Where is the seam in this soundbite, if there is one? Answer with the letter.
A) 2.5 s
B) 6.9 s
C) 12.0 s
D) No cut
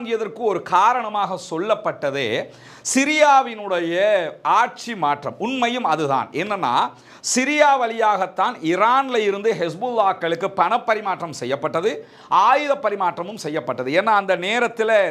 D